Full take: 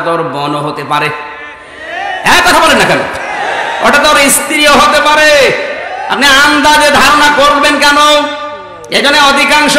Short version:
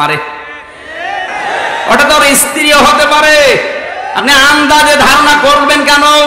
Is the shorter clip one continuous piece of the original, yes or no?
no